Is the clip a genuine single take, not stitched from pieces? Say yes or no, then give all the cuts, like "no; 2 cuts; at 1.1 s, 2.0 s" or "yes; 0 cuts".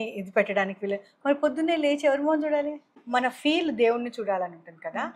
no; 1 cut; at 3.0 s